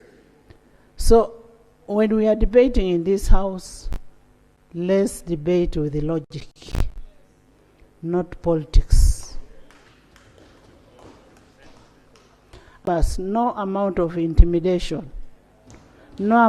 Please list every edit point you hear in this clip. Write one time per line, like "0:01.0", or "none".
0:12.9